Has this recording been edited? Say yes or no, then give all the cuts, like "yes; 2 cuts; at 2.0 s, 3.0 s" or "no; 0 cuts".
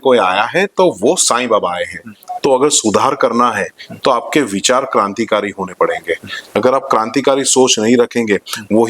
yes; 1 cut; at 2.2 s